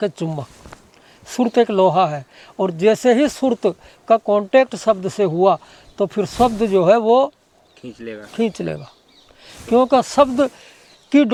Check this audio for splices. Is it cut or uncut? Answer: uncut